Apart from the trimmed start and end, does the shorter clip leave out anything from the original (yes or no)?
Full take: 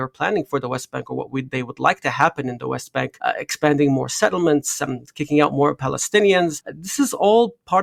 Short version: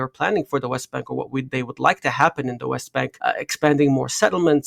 no